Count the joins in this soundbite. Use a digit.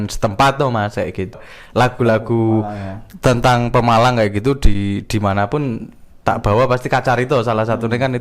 1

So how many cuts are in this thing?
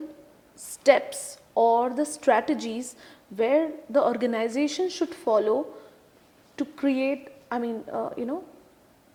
0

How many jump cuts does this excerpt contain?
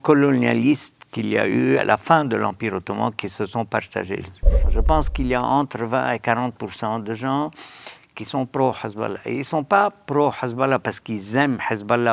2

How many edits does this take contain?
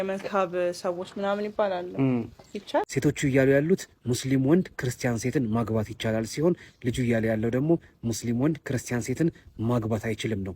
1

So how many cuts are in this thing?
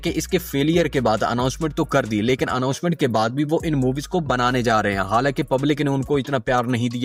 0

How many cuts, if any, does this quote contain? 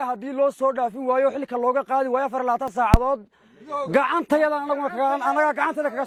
0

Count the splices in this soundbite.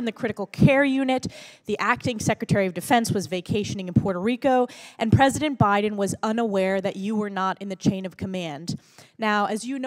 2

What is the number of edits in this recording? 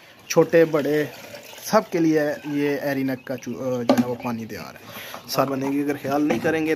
1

